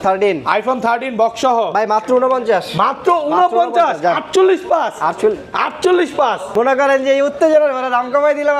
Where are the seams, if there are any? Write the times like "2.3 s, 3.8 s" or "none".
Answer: 6.5 s